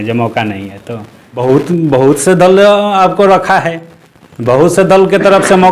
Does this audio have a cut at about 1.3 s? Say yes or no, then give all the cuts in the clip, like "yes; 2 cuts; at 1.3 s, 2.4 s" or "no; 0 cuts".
yes; 1 cut; at 1.3 s